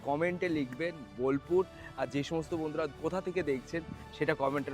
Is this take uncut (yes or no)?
no